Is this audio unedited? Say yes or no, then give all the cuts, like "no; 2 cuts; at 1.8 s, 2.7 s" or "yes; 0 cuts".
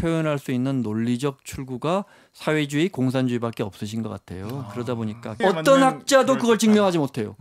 no; 1 cut; at 5.4 s